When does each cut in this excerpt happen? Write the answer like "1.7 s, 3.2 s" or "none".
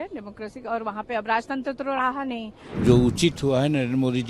2.6 s